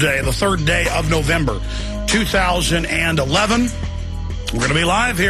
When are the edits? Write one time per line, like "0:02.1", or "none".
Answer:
0:01.2